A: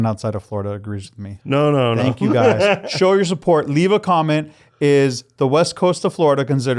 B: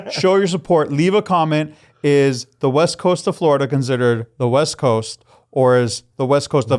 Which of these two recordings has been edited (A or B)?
A